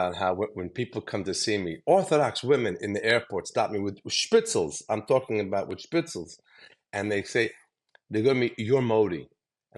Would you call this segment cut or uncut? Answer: uncut